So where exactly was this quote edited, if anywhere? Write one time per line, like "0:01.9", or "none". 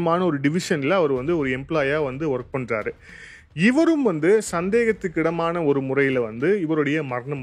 none